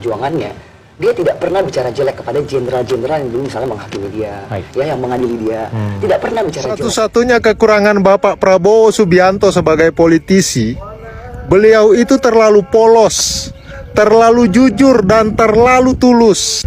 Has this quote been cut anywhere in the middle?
yes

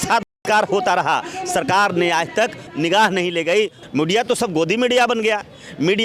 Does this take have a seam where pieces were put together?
yes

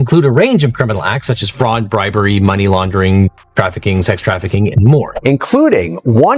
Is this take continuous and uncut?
no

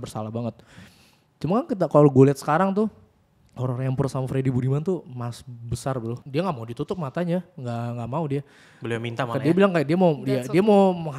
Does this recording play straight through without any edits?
no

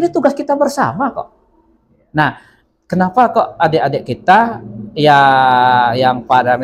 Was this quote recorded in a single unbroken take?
yes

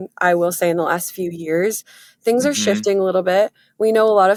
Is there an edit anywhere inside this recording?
no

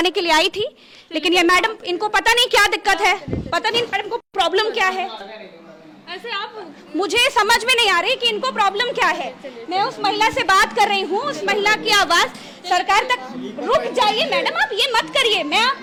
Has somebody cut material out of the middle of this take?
no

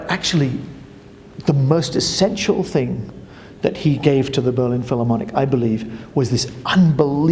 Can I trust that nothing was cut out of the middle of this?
yes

